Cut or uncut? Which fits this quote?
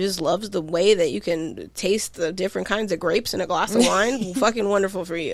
uncut